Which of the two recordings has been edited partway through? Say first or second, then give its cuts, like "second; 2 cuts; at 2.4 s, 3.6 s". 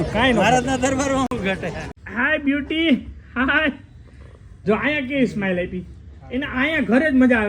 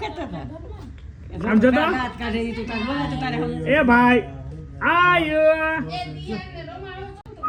first; 1 cut; at 2.1 s